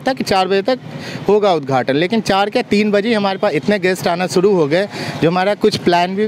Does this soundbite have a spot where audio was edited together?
no; 0 cuts

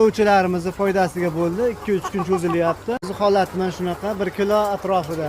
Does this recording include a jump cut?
yes; 1 cut; at 3.1 s

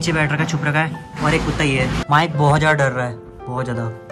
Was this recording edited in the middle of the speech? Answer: yes; 1 cut; at 2.0 s

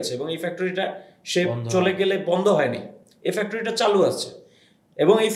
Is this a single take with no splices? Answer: yes; 0 cuts

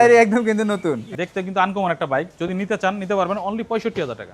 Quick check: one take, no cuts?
no; 1 cut; at 1.1 s

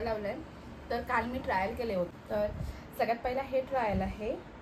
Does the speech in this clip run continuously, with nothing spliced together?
no; 1 cut; at 2.1 s

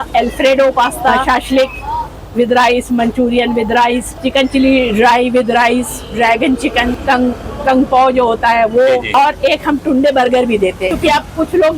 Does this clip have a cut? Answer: yes; 5 cuts; at 1.2 s, 4.2 s, 7.0 s, 9.1 s, 11.0 s

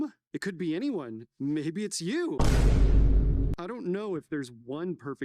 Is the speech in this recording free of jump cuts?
yes; 0 cuts

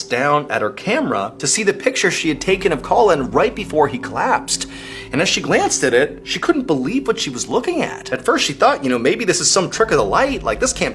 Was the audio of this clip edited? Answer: no; 0 cuts

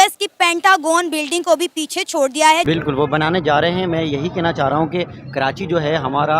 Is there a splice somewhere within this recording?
yes; 1 cut; at 2.6 s

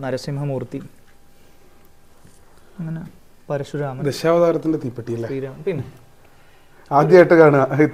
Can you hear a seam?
no; 0 cuts

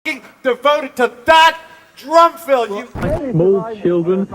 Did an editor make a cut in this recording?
yes; 1 cut; at 2.9 s

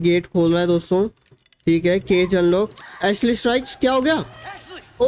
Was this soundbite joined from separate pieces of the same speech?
no; 0 cuts

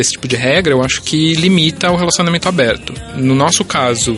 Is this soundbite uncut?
no; 1 cut; at 3.1 s

